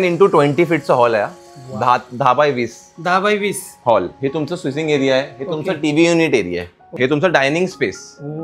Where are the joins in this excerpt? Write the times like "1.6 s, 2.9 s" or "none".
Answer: 6.9 s